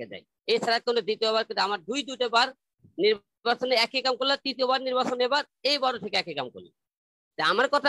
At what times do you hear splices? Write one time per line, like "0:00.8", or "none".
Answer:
none